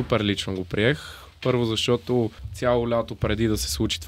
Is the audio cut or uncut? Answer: cut